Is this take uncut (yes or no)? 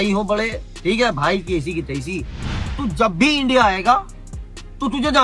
no